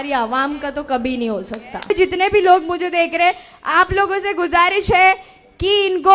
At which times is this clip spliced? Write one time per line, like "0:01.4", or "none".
0:01.9